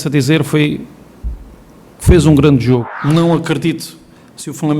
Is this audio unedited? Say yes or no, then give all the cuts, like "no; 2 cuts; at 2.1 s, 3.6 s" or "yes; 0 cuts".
no; 1 cut; at 2.9 s